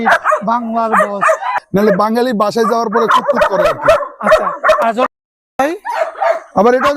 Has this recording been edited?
yes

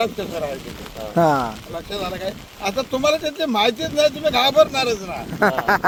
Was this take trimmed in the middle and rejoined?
no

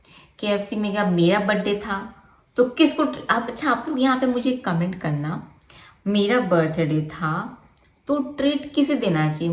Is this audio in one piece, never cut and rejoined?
yes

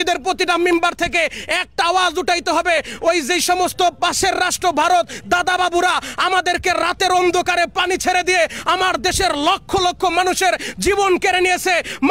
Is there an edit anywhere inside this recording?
no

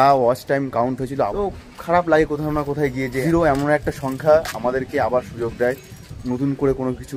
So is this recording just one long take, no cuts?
no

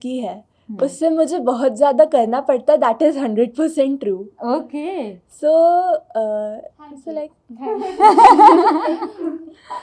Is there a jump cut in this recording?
no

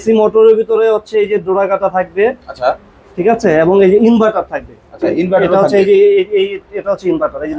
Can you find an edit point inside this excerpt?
no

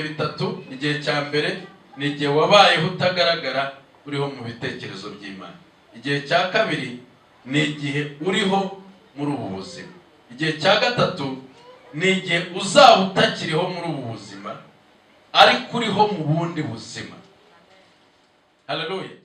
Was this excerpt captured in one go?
yes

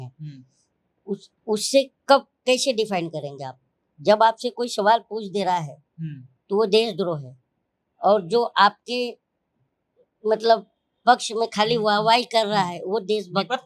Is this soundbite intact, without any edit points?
yes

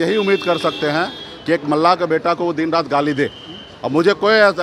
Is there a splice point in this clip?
no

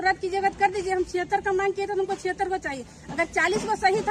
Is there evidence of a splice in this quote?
no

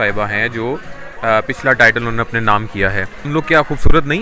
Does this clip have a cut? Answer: yes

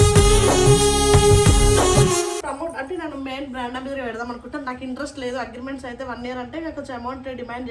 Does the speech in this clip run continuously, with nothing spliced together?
no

